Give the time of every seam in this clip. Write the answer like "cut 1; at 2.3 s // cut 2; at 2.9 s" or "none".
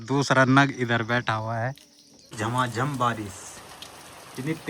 cut 1; at 2.3 s